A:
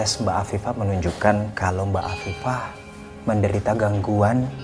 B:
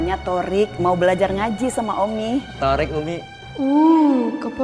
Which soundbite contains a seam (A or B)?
B